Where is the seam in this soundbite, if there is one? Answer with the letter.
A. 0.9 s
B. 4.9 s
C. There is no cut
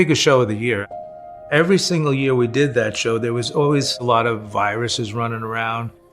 A